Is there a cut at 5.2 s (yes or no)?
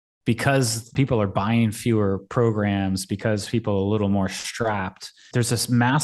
yes